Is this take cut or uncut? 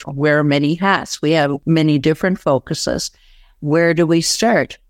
cut